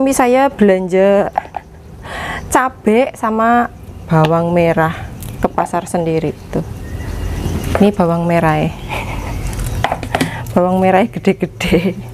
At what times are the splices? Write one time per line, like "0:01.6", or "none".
none